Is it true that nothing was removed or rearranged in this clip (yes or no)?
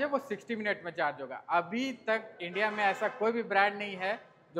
yes